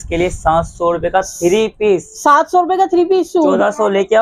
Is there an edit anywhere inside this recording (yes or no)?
no